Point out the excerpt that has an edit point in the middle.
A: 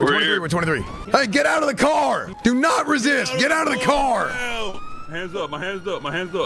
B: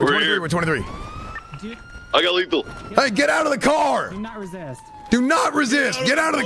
A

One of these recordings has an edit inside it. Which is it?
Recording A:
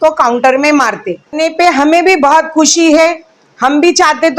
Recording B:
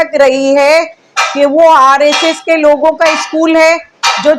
A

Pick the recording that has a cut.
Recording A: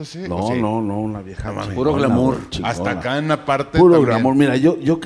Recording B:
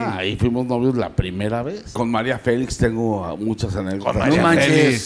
B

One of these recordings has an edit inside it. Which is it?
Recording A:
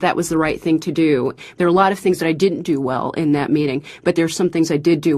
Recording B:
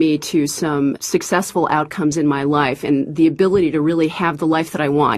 A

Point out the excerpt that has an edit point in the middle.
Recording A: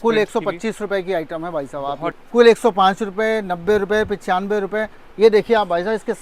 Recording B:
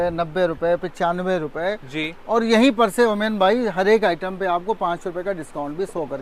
A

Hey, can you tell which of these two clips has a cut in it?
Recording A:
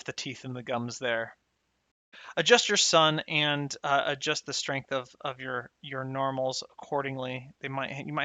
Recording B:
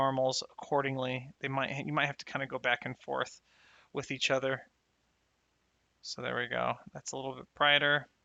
A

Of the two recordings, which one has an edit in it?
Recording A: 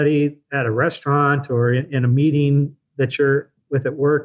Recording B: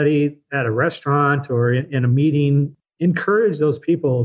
B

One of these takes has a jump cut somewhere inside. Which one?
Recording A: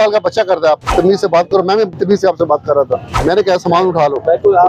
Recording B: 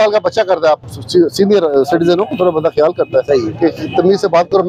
A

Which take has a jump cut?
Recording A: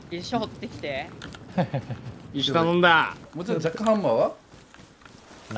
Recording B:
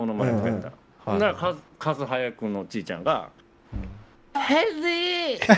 A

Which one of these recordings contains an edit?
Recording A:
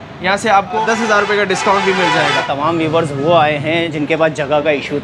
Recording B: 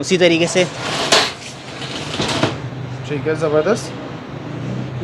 A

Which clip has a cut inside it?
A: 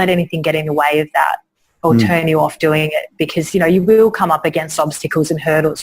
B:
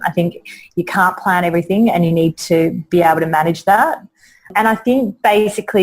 B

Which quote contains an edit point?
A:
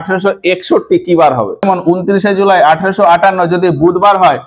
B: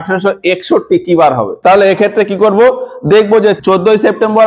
A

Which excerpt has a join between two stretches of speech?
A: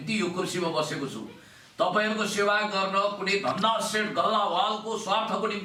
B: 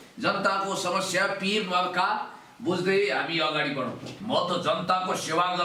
B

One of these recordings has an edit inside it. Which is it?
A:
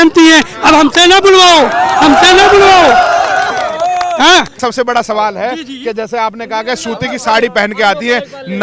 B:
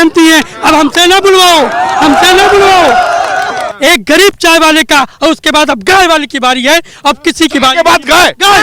B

